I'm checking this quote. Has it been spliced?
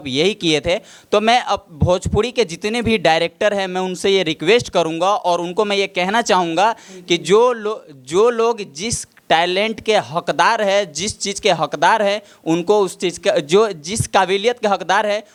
no; 0 cuts

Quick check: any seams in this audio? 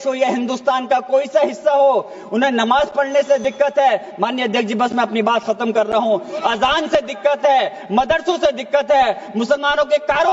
no; 0 cuts

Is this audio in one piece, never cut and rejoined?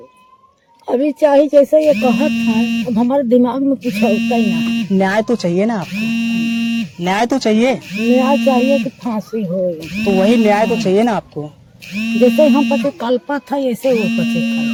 yes; 0 cuts

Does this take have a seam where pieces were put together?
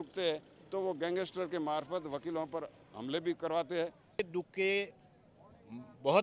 yes; 1 cut; at 4.2 s

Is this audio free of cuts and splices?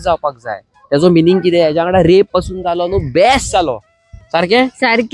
yes; 0 cuts

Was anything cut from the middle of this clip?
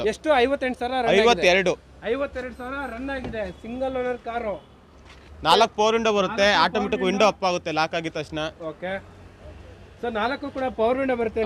no; 0 cuts

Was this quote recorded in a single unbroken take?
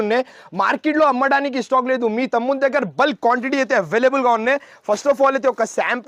yes; 0 cuts

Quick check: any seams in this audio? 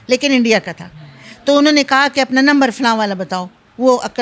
no; 0 cuts

